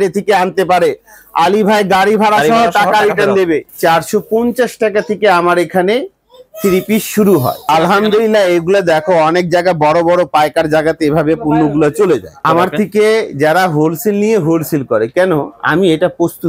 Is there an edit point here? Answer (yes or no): yes